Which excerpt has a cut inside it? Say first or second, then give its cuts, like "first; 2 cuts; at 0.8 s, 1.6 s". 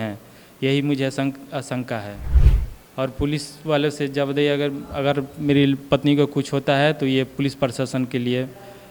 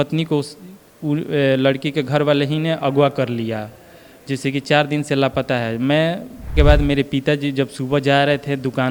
second; 1 cut; at 6.5 s